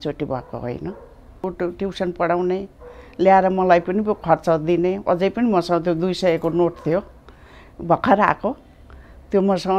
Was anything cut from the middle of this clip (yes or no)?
yes